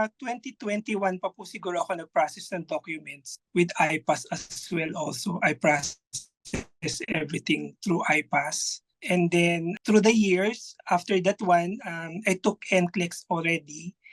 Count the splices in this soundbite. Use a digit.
1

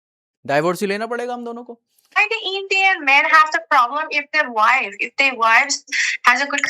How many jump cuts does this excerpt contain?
1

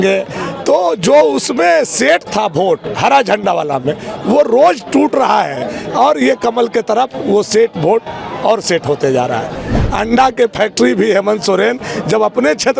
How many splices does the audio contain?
1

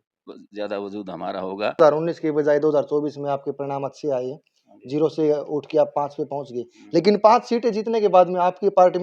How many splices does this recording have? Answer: 1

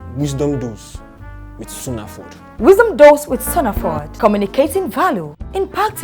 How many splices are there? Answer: 1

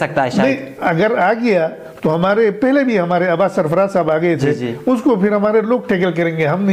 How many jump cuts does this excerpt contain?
0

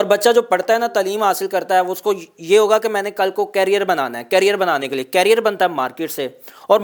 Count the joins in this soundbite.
0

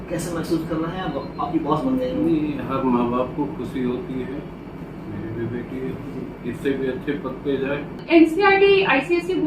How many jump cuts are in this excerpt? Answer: 1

